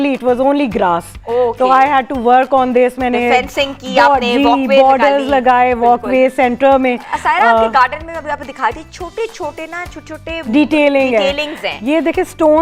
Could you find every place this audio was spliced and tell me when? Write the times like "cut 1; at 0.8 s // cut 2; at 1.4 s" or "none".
none